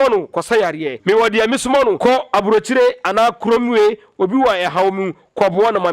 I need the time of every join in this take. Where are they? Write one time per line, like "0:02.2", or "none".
0:00.9
0:02.0